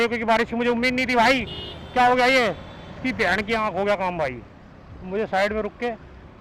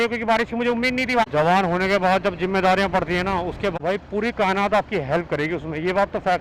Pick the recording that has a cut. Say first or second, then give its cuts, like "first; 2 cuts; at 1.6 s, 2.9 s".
second; 2 cuts; at 1.2 s, 3.7 s